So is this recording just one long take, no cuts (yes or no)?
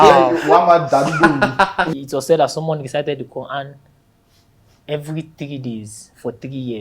no